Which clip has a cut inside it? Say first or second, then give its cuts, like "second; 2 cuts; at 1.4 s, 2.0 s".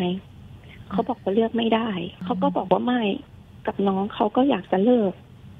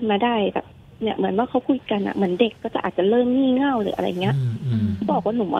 first; 1 cut; at 2.2 s